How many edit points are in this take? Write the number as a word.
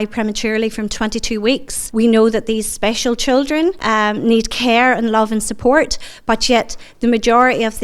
two